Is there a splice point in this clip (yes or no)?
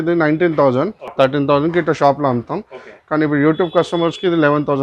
yes